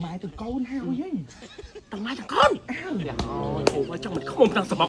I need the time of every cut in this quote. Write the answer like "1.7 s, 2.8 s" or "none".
none